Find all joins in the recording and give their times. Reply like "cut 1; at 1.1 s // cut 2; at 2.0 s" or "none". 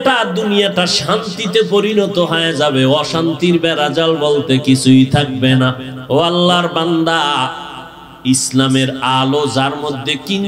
cut 1; at 5.9 s